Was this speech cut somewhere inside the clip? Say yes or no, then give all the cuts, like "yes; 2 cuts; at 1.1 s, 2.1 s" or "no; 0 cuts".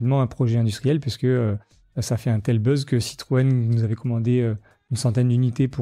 no; 0 cuts